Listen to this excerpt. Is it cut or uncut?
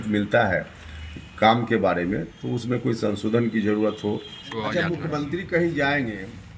cut